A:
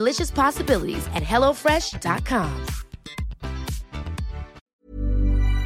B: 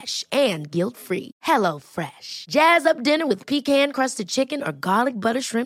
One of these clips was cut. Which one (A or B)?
A